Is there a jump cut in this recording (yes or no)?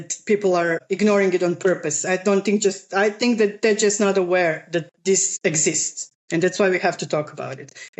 no